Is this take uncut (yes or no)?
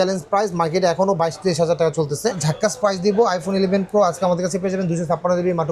no